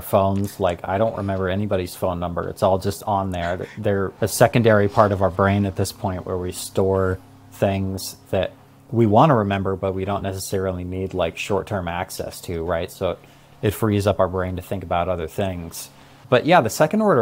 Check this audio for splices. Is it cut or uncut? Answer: uncut